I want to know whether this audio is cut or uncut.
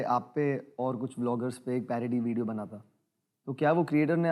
uncut